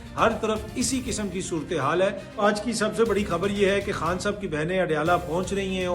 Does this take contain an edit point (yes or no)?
yes